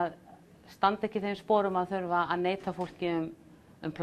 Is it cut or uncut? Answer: uncut